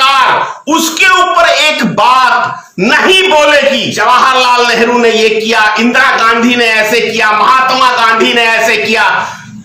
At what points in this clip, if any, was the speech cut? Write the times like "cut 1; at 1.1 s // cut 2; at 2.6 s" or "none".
cut 1; at 3.9 s